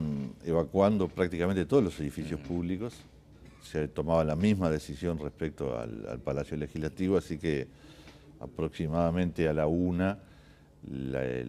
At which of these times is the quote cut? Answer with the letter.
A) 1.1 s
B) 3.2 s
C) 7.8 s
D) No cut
A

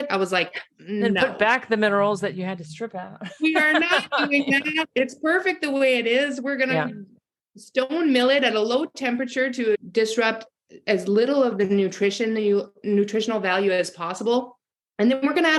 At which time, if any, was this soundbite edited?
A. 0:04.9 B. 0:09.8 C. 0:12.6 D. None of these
B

